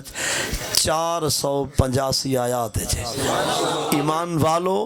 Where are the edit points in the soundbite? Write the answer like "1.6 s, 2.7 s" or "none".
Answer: 3.9 s